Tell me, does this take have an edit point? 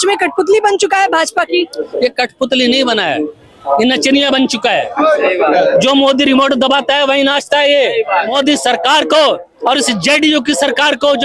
yes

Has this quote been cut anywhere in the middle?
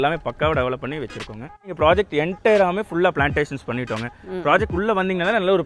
yes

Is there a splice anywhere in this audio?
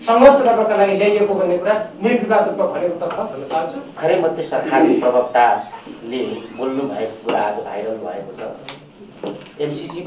yes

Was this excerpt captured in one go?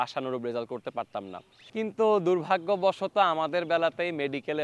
no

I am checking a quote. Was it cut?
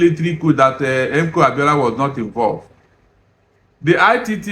no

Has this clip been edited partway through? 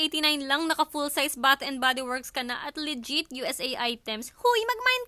no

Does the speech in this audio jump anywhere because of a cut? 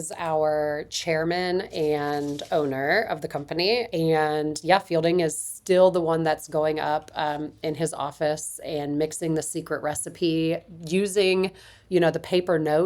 yes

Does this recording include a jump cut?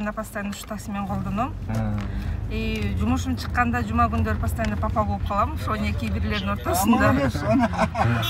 no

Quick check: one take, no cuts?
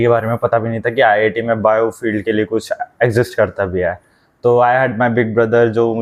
yes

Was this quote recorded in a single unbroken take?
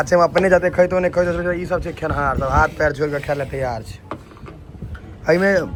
yes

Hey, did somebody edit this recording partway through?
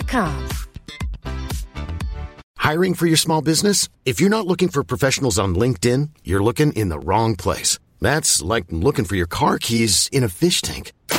yes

